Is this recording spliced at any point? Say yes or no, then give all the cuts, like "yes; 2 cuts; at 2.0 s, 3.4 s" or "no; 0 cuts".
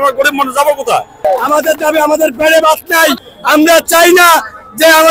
yes; 2 cuts; at 1.2 s, 3.2 s